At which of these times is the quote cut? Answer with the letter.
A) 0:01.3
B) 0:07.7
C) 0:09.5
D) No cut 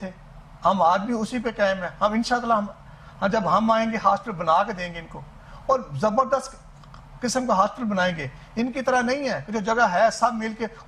D